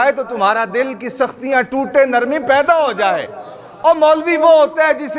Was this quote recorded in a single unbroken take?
yes; 0 cuts

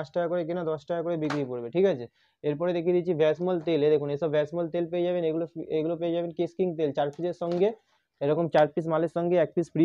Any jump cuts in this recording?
no; 0 cuts

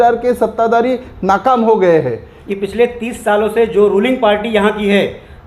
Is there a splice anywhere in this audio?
yes; 1 cut; at 2.3 s

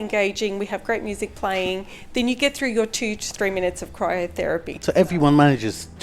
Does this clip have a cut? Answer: no; 0 cuts

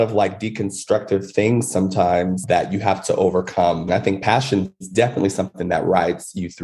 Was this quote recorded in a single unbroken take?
no; 1 cut; at 3.9 s

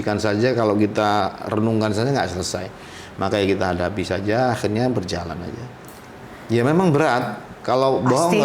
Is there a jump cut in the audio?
no; 0 cuts

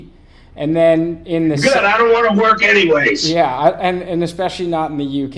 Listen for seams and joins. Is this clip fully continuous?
yes; 0 cuts

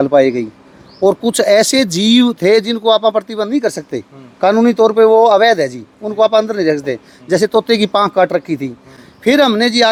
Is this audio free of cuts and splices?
yes; 0 cuts

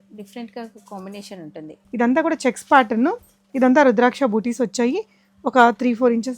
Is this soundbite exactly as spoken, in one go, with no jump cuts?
no; 1 cut; at 1.8 s

